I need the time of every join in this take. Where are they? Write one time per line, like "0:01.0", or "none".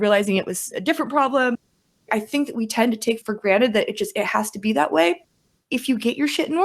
0:01.9
0:05.4